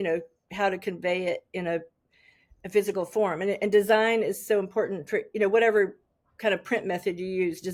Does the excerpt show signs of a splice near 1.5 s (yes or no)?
no